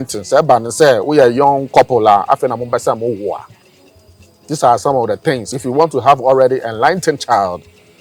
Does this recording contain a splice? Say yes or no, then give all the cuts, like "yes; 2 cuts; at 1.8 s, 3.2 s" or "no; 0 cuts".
no; 0 cuts